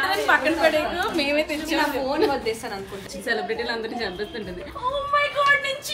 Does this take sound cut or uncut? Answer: cut